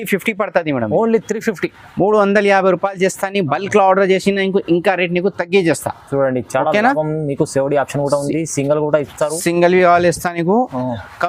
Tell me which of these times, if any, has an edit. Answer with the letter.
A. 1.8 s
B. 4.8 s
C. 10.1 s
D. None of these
D